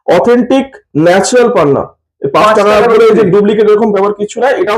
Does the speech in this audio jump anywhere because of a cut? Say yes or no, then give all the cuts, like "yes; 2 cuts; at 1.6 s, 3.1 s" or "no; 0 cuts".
no; 0 cuts